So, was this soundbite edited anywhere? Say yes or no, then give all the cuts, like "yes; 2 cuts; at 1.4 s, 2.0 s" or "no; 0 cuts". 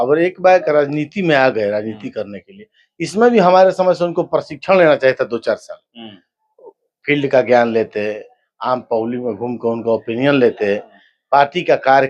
no; 0 cuts